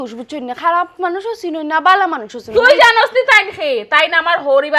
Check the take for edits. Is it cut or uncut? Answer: uncut